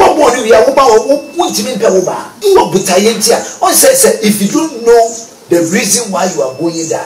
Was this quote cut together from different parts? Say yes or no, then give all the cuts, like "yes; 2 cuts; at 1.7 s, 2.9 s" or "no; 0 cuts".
yes; 1 cut; at 2.3 s